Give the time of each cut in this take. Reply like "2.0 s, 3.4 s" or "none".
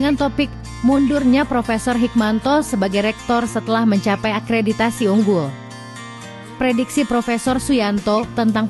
none